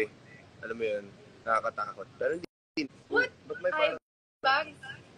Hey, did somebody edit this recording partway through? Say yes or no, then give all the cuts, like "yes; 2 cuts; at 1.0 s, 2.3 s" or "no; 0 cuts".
yes; 1 cut; at 2.8 s